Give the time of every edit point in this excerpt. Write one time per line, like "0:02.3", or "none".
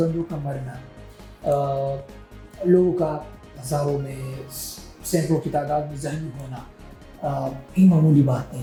none